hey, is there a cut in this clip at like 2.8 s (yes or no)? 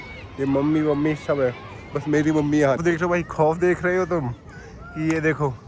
yes